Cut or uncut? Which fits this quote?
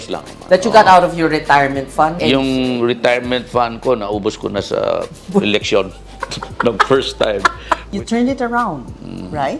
uncut